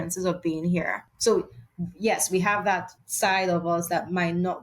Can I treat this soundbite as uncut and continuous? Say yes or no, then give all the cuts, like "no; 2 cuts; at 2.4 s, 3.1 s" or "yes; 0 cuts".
no; 2 cuts; at 1.1 s, 3.0 s